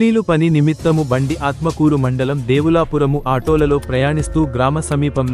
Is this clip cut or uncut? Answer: uncut